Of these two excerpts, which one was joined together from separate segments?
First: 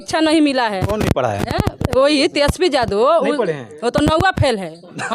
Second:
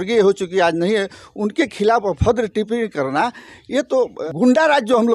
second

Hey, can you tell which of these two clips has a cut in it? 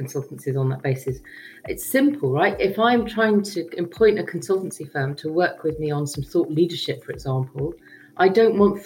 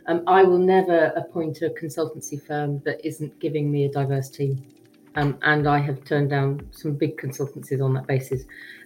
second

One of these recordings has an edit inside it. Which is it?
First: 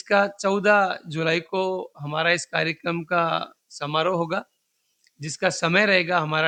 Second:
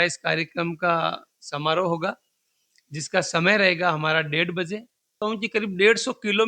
second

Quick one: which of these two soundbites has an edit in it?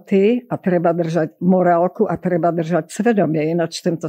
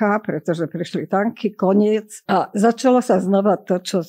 second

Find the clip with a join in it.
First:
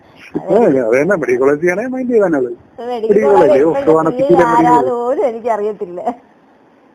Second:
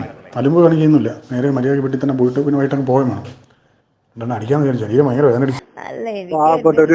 second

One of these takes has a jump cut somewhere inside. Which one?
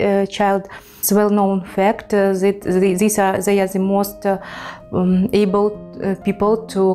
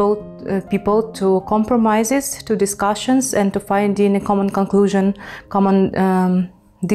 first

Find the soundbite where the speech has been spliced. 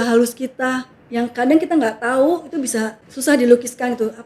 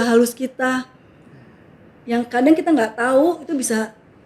first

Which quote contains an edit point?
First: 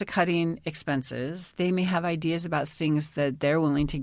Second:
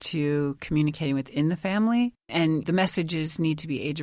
second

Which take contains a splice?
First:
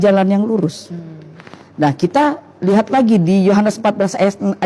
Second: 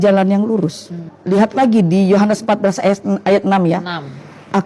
second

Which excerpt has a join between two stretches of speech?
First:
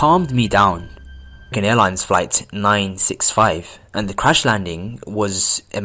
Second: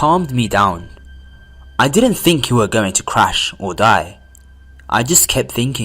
second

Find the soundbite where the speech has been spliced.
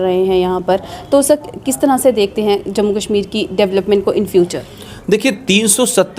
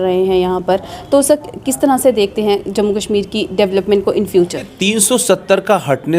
second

